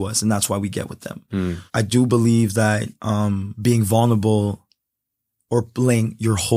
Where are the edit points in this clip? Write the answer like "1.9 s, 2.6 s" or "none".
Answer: 1.6 s, 3.5 s